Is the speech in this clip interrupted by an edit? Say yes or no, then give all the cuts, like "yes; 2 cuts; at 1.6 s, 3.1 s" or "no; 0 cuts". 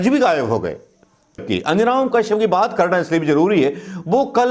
yes; 1 cut; at 1.4 s